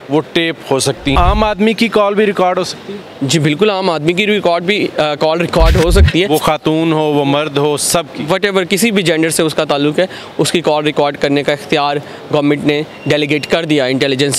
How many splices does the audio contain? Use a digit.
2